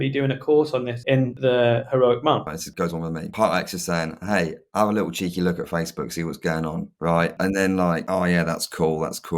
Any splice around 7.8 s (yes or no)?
no